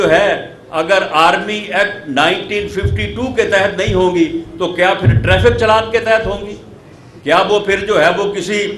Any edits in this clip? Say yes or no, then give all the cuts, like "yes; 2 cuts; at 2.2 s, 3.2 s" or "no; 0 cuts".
no; 0 cuts